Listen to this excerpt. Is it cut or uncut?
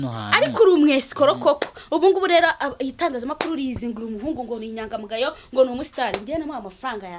uncut